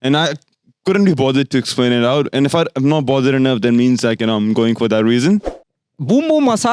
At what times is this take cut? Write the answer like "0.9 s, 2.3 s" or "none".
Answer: 5.5 s